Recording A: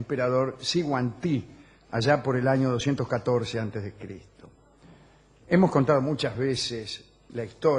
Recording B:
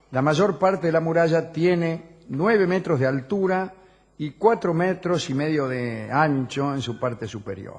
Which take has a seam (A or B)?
B